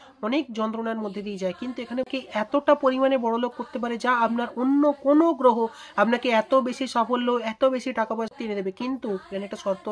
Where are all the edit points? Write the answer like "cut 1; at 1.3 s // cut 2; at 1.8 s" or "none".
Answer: cut 1; at 2.1 s // cut 2; at 8.3 s